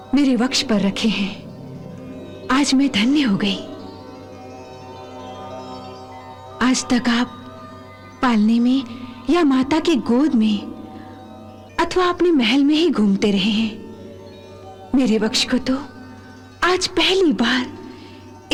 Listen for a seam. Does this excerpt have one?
no; 0 cuts

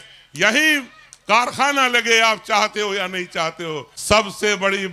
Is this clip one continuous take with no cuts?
no; 1 cut; at 3.9 s

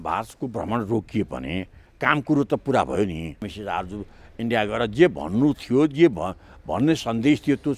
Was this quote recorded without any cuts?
no; 1 cut; at 3.5 s

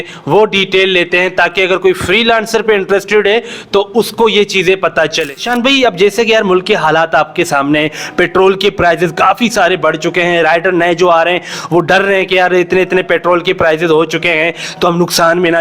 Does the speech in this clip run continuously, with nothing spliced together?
no; 1 cut; at 5.4 s

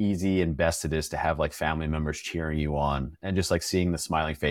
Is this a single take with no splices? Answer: yes; 0 cuts

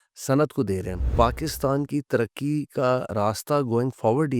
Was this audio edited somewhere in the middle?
yes; 1 cut; at 1.1 s

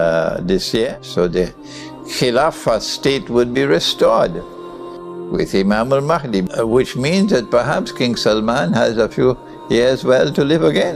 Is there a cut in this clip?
yes; 2 cuts; at 1.0 s, 6.5 s

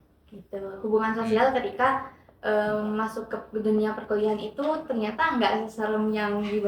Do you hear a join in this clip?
no; 0 cuts

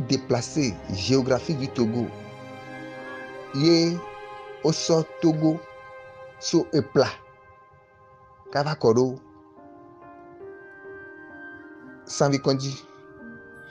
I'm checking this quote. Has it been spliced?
yes; 3 cuts; at 9.2 s, 12.2 s, 12.8 s

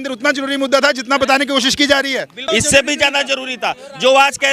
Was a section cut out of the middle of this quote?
yes; 1 cut; at 2.3 s

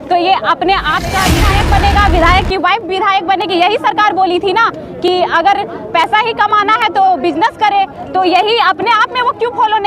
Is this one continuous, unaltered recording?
no; 1 cut; at 1.4 s

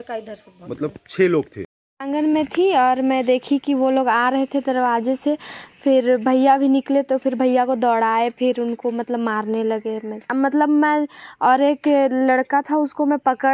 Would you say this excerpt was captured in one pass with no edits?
no; 2 cuts; at 1.6 s, 10.3 s

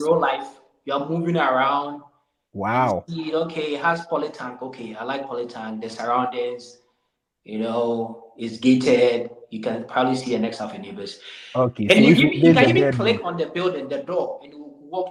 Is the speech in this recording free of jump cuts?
yes; 0 cuts

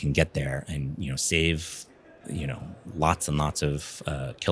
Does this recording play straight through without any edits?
yes; 0 cuts

